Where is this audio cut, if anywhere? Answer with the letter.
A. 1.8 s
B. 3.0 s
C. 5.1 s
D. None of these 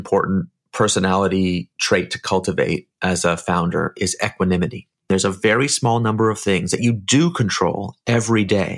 C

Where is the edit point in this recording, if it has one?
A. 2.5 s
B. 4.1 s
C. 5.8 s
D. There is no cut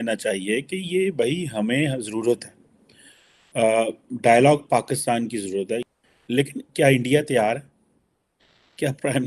C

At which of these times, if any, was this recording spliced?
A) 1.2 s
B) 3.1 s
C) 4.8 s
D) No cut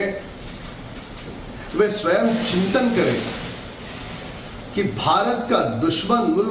B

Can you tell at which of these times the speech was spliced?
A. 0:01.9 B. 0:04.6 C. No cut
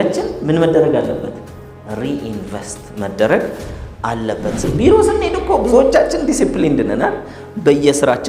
B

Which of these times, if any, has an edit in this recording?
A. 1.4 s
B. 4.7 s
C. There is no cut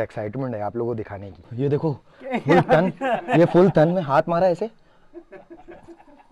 A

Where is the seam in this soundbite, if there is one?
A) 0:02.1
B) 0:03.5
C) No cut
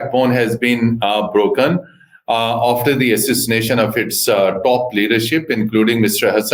C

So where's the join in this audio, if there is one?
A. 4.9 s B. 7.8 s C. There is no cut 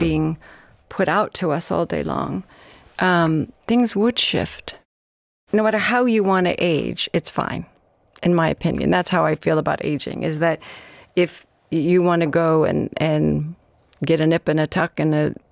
A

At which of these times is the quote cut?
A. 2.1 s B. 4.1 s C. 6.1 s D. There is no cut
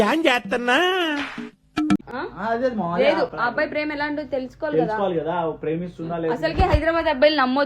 A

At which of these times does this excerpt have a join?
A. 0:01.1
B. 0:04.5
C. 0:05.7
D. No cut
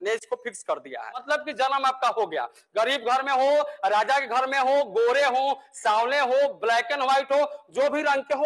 A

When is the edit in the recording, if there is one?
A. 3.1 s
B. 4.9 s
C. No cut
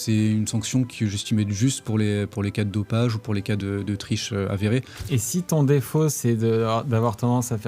B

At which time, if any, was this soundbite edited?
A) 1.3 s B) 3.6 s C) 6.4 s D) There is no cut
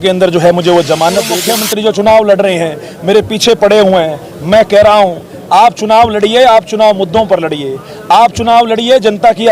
A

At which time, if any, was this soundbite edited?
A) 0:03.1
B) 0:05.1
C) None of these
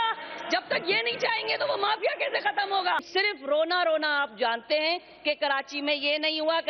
A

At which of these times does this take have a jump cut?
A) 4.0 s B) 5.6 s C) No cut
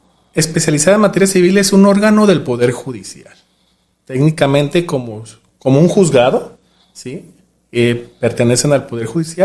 C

